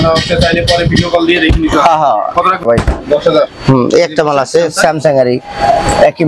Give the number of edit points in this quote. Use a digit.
1